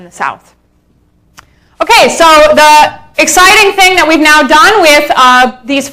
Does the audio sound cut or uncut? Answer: cut